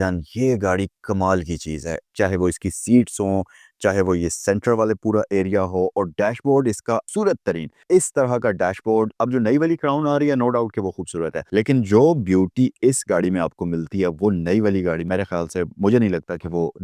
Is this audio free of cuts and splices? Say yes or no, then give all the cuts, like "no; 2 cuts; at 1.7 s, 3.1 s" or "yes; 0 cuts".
no; 2 cuts; at 11.4 s, 15.0 s